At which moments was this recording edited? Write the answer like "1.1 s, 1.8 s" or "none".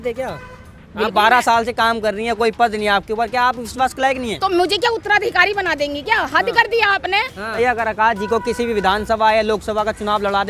7.5 s